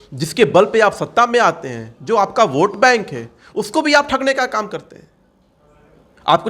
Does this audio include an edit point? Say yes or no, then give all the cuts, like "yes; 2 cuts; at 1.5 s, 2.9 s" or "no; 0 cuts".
no; 0 cuts